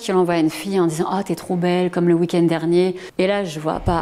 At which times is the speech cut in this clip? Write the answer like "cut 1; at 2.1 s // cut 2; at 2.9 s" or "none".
cut 1; at 3.0 s